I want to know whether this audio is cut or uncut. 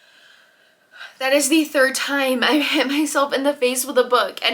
uncut